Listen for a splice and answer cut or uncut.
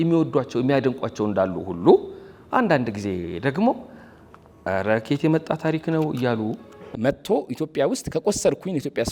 cut